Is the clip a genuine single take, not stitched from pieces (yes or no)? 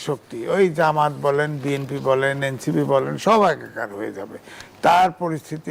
yes